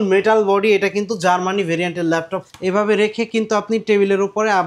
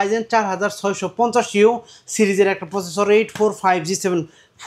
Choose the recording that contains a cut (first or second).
first